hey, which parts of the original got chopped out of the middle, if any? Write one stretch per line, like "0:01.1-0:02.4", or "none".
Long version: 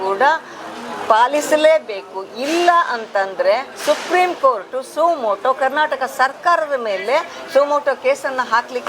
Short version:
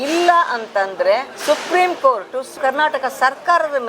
0:05.0-0:05.5